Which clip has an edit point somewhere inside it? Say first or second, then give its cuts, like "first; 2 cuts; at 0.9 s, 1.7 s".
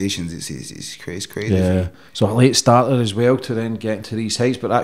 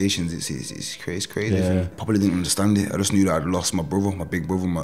second; 1 cut; at 2.0 s